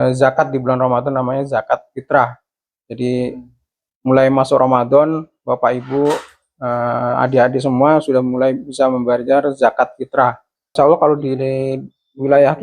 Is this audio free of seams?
no; 1 cut; at 10.5 s

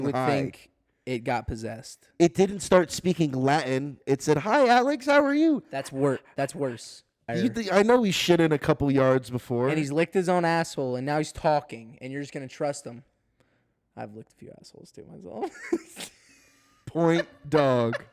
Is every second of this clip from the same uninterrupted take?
no; 1 cut; at 7.3 s

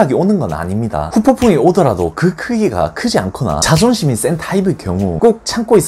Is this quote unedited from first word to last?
no; 3 cuts; at 1.0 s, 3.6 s, 5.1 s

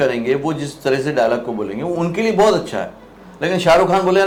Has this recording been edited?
no; 0 cuts

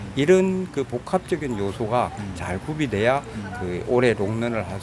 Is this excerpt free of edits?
yes; 0 cuts

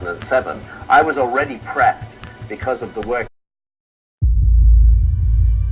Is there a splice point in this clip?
no; 0 cuts

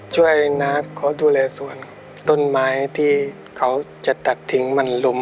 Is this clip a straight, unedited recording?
no; 3 cuts; at 0.9 s, 2.0 s, 3.4 s

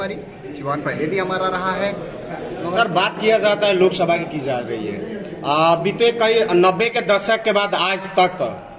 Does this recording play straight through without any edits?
no; 1 cut; at 2.8 s

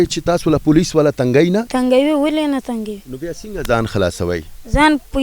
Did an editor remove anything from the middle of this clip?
yes; 1 cut; at 1.7 s

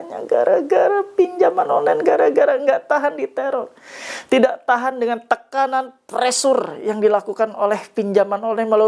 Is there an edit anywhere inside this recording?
no; 0 cuts

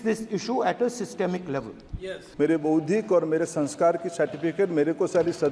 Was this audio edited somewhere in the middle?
yes; 1 cut; at 2.2 s

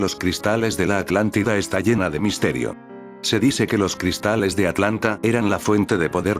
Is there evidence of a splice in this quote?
yes; 1 cut; at 1.1 s

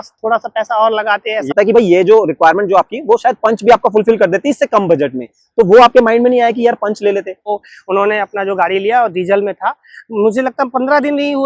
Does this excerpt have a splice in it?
yes; 2 cuts; at 1.5 s, 7.5 s

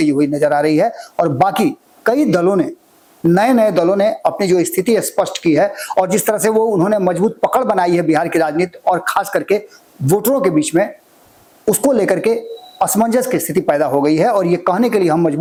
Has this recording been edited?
no; 0 cuts

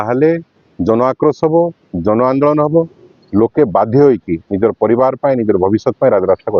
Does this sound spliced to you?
no; 0 cuts

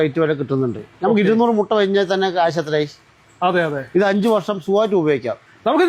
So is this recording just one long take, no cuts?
yes; 0 cuts

